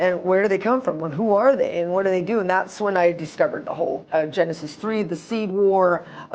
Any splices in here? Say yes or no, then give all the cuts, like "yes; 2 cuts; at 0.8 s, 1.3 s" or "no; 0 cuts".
yes; 1 cut; at 4.0 s